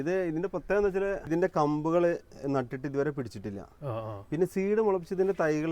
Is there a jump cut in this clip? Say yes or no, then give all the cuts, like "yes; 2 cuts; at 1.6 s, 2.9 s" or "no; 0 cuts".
yes; 1 cut; at 1.3 s